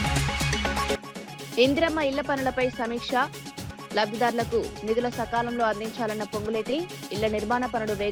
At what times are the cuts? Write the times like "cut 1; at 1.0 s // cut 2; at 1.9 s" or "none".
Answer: none